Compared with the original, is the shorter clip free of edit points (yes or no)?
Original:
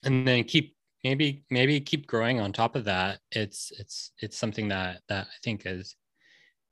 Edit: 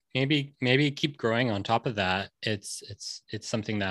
yes